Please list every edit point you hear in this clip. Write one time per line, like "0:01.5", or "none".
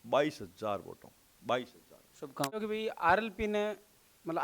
0:02.6